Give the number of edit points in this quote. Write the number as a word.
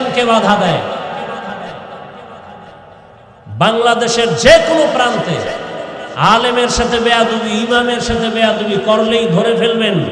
one